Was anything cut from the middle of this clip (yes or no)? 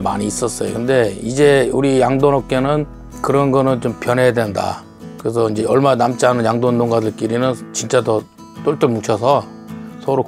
no